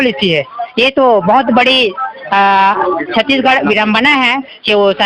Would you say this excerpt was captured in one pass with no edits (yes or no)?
yes